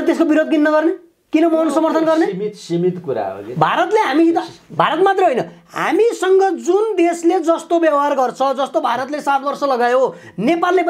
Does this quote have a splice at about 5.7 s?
no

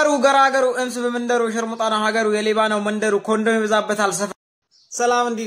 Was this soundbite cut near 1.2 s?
no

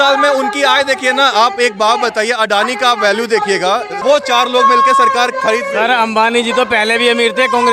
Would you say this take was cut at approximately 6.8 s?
no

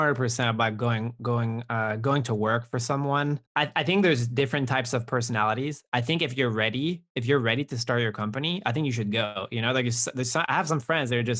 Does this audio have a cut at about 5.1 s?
no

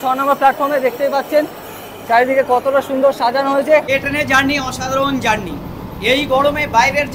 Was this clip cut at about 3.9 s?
yes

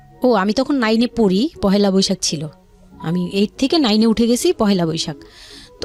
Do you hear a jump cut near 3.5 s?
no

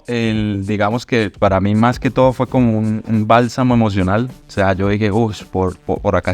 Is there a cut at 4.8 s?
no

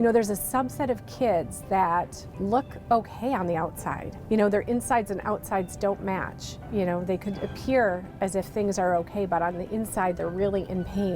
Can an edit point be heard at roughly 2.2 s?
yes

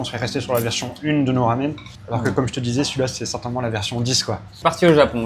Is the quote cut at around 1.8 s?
no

